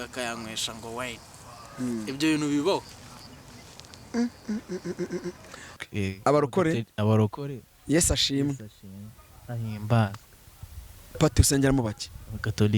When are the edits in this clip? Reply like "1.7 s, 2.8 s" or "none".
5.8 s